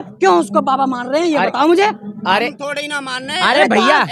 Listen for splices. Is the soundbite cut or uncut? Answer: uncut